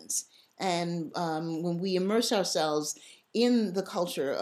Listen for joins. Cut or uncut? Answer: uncut